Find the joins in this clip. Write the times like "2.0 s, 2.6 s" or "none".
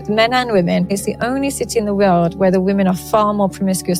1.0 s